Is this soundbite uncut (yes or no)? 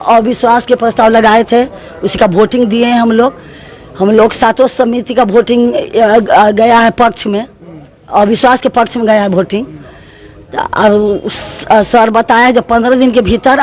yes